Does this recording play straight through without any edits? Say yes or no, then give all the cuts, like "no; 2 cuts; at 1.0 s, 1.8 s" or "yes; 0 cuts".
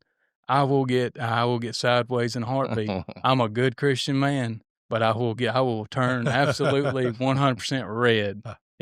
yes; 0 cuts